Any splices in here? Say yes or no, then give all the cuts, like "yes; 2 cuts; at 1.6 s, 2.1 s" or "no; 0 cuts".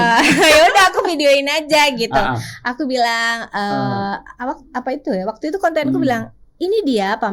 no; 0 cuts